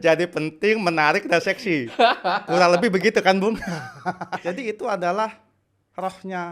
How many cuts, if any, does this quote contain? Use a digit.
1